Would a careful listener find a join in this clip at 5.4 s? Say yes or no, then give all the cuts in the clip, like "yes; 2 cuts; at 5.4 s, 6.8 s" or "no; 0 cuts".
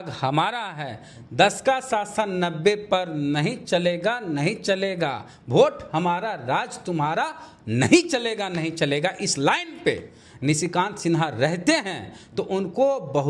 no; 0 cuts